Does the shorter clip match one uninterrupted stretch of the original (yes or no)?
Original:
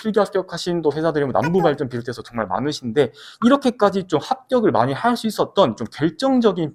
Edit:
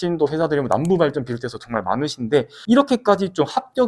no